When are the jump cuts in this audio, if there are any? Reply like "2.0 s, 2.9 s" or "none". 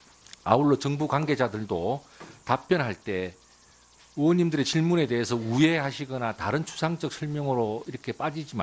0.9 s